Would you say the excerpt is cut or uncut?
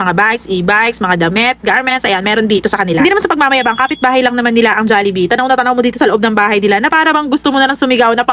uncut